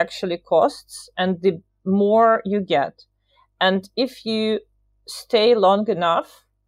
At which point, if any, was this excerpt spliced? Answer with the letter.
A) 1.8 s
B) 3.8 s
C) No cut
C